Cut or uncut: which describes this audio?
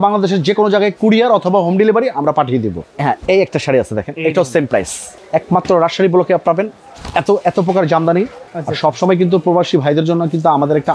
cut